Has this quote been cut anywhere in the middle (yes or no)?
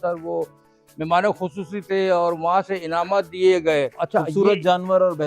yes